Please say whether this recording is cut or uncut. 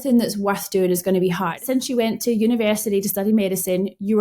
cut